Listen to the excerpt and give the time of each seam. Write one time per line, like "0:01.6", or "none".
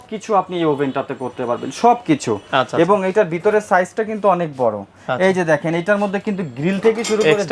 none